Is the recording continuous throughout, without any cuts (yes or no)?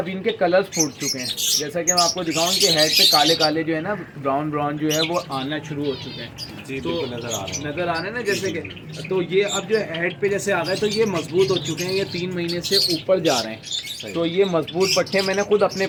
yes